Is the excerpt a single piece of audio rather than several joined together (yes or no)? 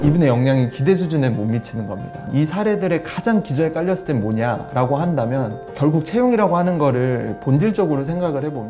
no